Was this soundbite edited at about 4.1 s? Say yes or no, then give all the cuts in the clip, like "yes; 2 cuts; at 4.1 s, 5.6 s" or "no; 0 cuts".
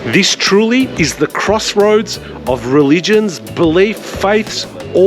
yes; 2 cuts; at 0.9 s, 4.1 s